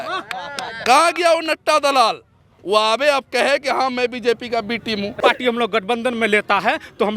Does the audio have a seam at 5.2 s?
yes; 1 cut; at 5.2 s

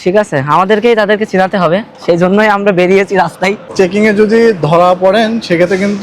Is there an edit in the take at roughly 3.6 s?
yes; 1 cut; at 3.6 s

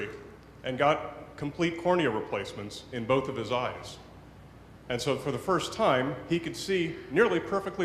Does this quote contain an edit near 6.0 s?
no; 1 cut; at 2.7 s

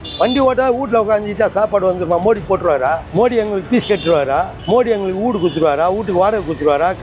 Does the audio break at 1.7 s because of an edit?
no; 2 cuts; at 3.0 s, 4.6 s

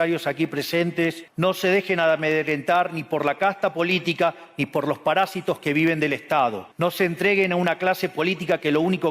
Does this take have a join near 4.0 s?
no; 2 cuts; at 1.2 s, 6.6 s

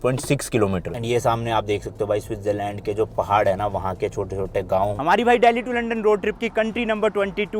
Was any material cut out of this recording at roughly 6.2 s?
no; 2 cuts; at 0.9 s, 5.0 s

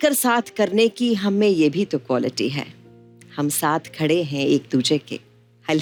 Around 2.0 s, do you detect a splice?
no; 0 cuts

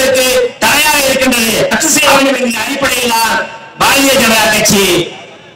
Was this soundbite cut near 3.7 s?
no; 1 cut; at 1.7 s

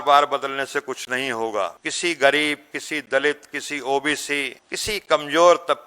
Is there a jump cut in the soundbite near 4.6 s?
yes; 2 cuts; at 1.8 s, 4.6 s

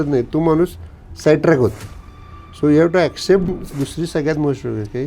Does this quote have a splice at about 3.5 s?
yes; 1 cut; at 3.5 s

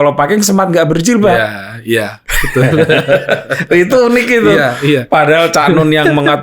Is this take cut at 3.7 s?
no; 0 cuts

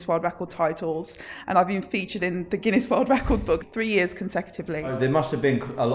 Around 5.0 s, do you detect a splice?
yes; 2 cuts; at 3.7 s, 5.0 s

